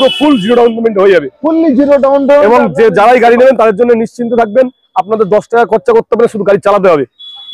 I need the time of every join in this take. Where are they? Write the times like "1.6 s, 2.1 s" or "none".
none